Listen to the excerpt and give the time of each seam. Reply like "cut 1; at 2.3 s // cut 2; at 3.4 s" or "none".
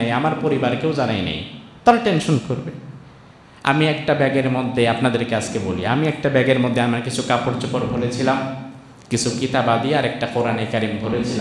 none